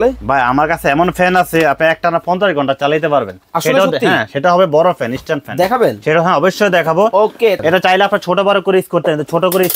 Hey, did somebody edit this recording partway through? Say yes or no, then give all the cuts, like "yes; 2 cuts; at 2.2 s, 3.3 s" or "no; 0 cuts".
yes; 1 cut; at 7.6 s